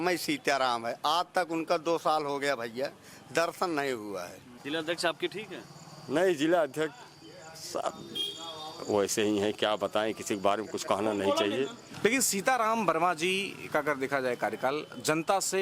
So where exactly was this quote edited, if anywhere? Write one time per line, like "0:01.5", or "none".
0:04.5
0:12.0